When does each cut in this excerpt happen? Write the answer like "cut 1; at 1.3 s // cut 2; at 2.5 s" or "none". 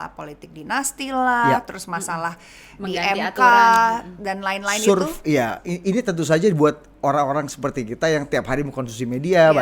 none